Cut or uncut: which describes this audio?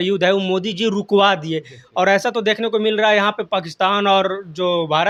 uncut